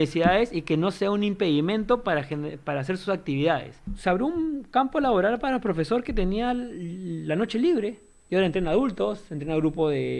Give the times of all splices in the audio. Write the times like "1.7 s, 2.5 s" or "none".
3.9 s